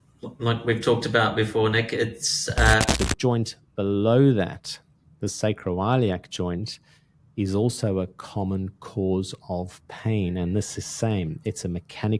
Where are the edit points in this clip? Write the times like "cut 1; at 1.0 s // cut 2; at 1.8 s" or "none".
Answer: cut 1; at 2.9 s